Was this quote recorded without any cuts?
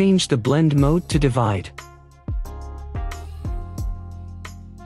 yes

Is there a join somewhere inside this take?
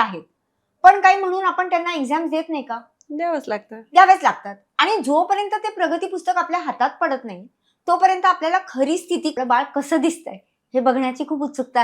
yes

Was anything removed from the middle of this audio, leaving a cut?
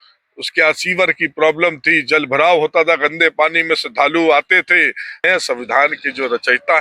yes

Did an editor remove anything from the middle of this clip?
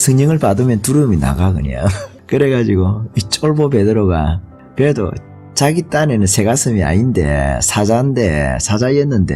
no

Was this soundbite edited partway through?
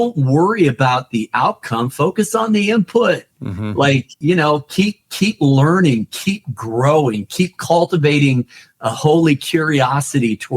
yes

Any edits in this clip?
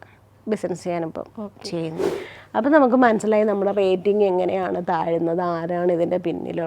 yes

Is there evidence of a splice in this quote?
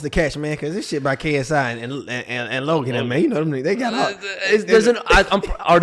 no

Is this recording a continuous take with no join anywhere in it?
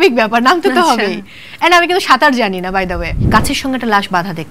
no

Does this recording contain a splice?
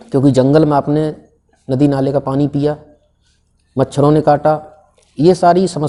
no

